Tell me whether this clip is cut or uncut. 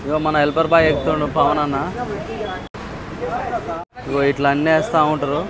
cut